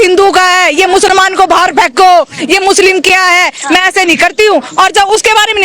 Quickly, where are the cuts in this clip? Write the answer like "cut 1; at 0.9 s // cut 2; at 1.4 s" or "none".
cut 1; at 4.7 s